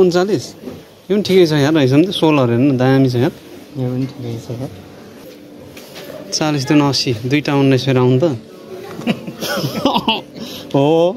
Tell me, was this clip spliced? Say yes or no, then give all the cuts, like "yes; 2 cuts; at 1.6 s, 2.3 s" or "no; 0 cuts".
yes; 1 cut; at 5.2 s